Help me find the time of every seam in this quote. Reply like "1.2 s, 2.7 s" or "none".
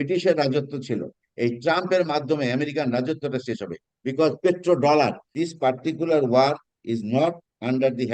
1.2 s, 5.3 s